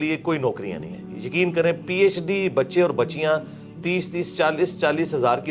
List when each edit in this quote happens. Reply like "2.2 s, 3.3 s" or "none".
none